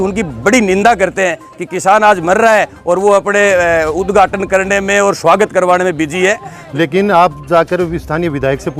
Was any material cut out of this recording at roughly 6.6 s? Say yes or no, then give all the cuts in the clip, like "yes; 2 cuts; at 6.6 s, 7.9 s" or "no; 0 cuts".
yes; 1 cut; at 6.6 s